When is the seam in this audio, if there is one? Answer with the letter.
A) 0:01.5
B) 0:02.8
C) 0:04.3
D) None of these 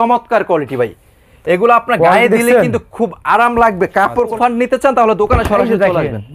C